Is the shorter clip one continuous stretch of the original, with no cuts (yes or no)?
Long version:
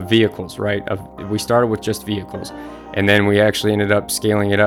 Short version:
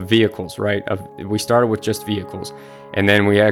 yes